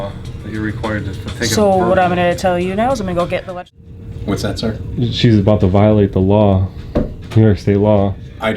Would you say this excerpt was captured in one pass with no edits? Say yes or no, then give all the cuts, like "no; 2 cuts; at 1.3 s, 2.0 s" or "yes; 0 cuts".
no; 1 cut; at 3.5 s